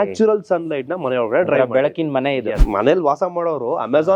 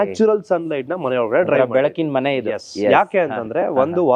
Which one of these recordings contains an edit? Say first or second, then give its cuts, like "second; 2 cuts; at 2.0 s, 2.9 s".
first; 1 cut; at 2.6 s